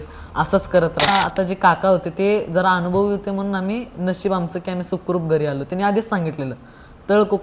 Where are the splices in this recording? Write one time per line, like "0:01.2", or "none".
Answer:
0:01.1